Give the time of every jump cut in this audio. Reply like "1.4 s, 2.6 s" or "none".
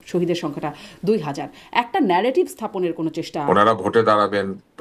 3.3 s